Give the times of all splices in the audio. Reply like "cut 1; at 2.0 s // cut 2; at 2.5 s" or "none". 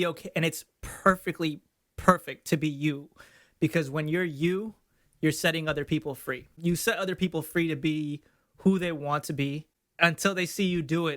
cut 1; at 6.5 s // cut 2; at 9.8 s